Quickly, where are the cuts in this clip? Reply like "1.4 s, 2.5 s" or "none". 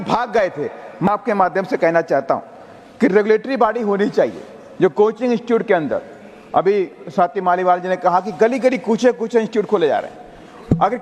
1.1 s